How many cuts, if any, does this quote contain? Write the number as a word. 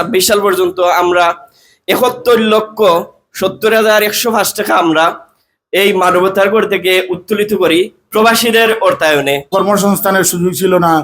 one